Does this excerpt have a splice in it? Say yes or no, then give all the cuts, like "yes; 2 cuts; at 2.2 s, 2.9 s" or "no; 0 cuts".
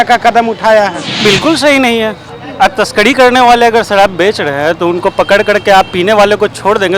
yes; 1 cut; at 1.1 s